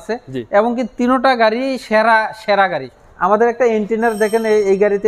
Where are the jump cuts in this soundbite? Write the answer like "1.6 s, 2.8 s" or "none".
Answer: 2.9 s

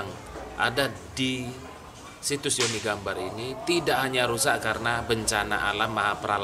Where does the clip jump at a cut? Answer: none

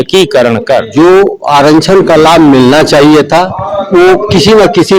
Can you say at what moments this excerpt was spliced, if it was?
0.9 s, 3.6 s

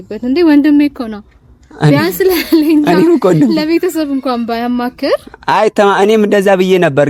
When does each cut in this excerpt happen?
none

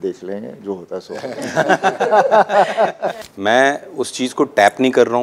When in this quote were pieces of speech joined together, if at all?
3.2 s

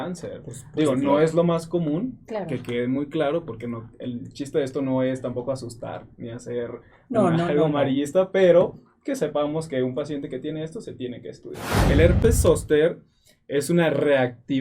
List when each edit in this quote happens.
11.9 s

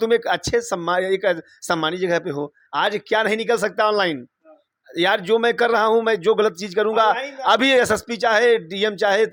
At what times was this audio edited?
none

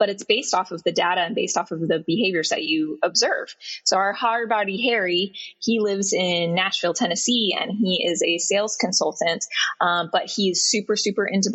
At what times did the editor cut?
none

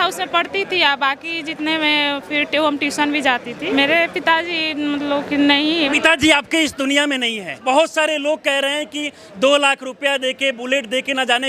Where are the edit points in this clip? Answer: 3.7 s, 5.9 s, 7.8 s

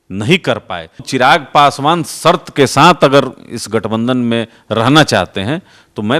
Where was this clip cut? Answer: 1.0 s

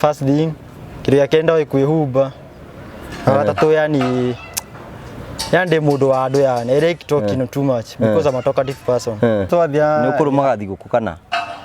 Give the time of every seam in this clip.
9.5 s

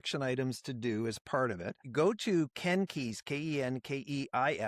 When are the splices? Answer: 1.9 s

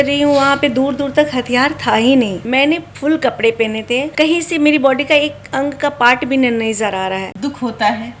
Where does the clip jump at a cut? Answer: 2.4 s, 4.1 s, 7.3 s

